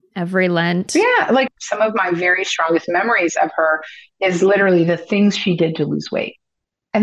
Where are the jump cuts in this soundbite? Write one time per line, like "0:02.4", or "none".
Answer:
0:01.5